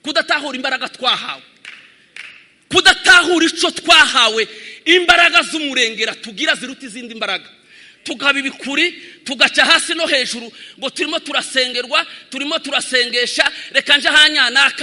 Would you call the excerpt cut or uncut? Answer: uncut